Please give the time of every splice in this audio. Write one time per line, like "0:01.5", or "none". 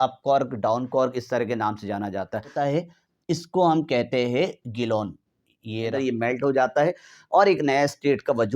0:02.5
0:05.9